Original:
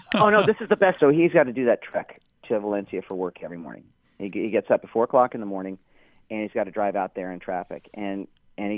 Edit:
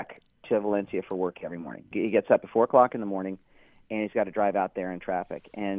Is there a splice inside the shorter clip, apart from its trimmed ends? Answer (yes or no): yes